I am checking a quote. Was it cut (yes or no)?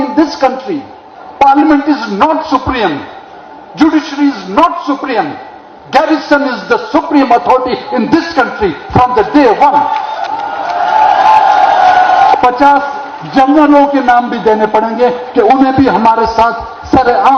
yes